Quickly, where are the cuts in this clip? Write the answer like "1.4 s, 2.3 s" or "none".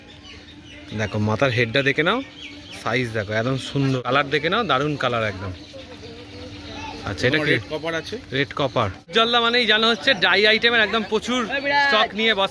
4.0 s, 9.1 s

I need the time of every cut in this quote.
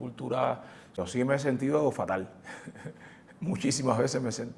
1.0 s

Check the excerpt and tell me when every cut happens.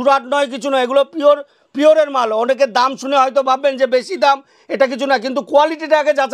none

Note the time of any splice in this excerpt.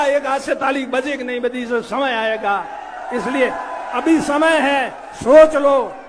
none

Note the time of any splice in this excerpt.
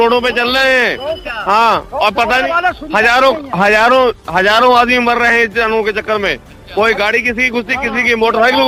none

